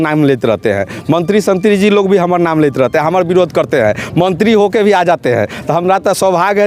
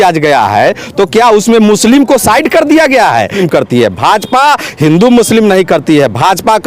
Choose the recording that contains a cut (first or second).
second